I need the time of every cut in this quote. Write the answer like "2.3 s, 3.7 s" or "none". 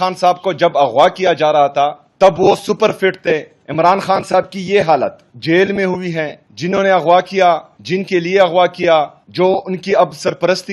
2.0 s, 3.6 s, 5.3 s, 6.4 s, 7.7 s, 9.2 s